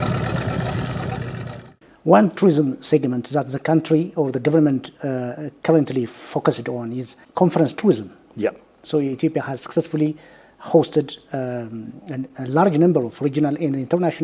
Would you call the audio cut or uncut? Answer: uncut